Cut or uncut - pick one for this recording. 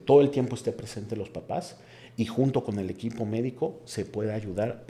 uncut